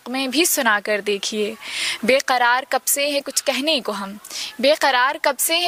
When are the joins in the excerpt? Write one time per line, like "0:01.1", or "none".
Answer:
none